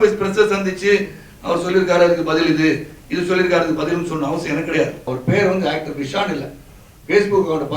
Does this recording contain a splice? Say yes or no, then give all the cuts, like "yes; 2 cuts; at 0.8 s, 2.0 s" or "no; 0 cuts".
yes; 1 cut; at 5.1 s